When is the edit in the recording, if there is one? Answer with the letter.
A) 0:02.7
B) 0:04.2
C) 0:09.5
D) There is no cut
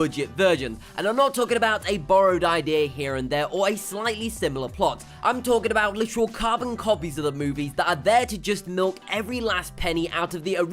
B